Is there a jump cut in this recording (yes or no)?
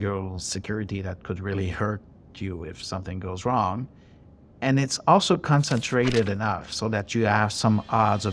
no